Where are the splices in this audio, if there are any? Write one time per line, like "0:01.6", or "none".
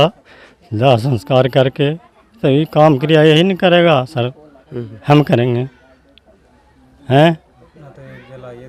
none